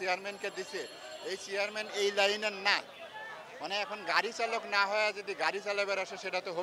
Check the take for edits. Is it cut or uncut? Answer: uncut